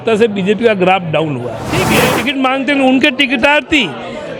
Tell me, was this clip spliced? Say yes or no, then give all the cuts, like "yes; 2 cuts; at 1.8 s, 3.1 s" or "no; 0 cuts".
yes; 1 cut; at 2.0 s